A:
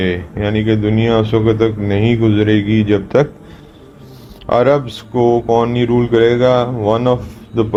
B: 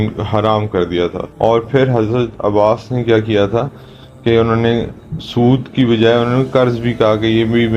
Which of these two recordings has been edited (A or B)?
B